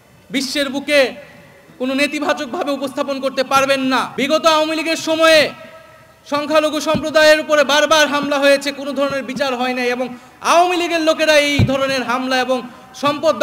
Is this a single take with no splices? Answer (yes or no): no